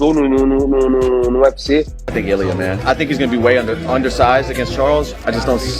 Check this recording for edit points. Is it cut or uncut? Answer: cut